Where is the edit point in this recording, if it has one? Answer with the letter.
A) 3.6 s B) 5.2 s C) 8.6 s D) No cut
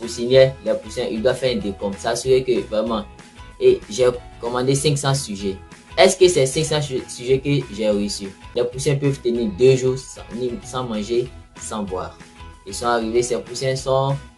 C